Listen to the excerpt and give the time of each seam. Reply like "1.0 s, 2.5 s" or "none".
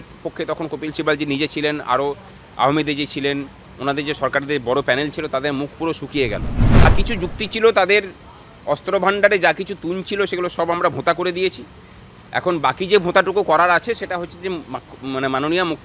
6.9 s